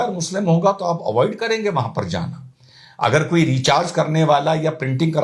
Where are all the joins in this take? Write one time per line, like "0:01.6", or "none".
none